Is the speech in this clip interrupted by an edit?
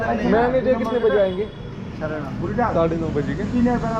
no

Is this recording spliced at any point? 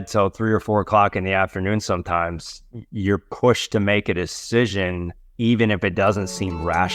no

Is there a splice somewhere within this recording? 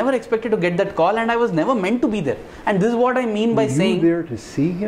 no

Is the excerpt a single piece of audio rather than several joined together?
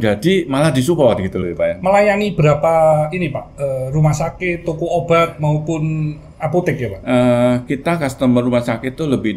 no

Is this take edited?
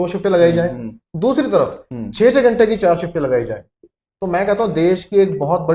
no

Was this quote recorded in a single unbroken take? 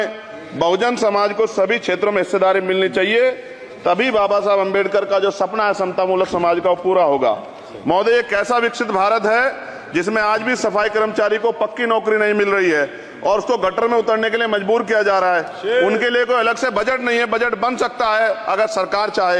yes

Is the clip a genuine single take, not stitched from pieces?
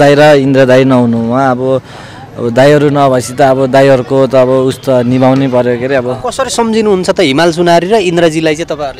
no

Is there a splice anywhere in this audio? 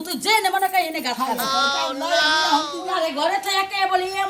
yes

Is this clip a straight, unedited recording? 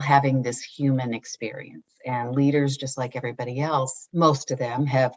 no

